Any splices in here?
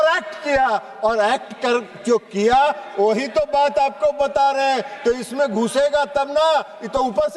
no; 0 cuts

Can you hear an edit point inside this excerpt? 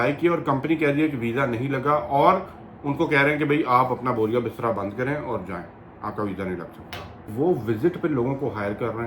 yes; 1 cut; at 7.3 s

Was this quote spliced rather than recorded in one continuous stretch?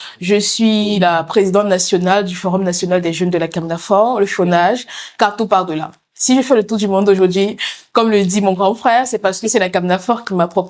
no; 0 cuts

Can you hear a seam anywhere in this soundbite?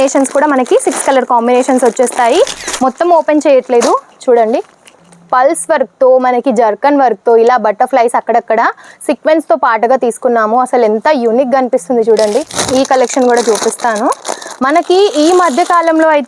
yes; 2 cuts; at 2.6 s, 12.6 s

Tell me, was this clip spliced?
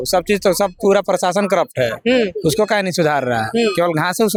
no; 0 cuts

